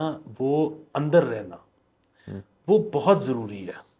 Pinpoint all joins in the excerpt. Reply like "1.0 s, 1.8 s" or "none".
none